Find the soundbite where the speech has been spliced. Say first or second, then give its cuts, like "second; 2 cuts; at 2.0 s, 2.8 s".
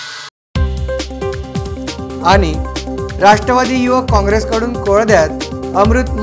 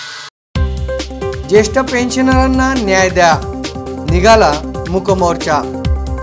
first; 1 cut; at 0.9 s